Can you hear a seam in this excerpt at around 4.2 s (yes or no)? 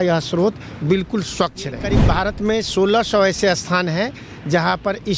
no